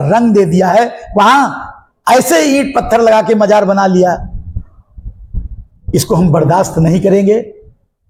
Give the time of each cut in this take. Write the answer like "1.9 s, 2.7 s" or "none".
none